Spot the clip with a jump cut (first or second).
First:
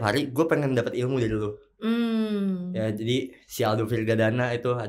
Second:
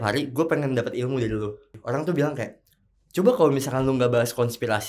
second